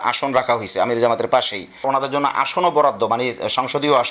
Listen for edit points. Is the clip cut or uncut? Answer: cut